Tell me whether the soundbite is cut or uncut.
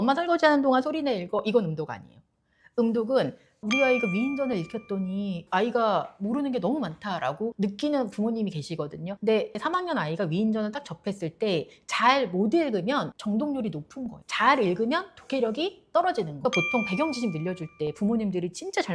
cut